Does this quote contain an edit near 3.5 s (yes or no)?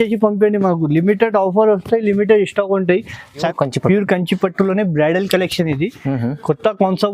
yes